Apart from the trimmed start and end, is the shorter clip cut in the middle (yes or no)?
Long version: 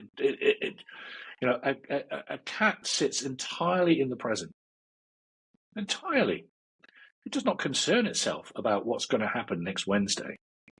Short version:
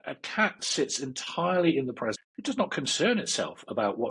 yes